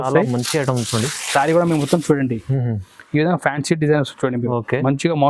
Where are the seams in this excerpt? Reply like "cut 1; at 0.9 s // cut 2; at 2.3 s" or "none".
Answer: none